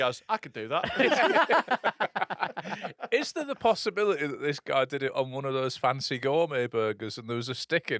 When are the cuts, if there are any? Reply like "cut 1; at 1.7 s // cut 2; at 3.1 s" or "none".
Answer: none

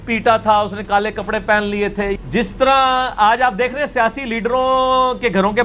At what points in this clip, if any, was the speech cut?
cut 1; at 2.2 s

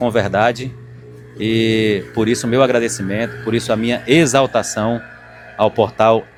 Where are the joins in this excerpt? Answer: none

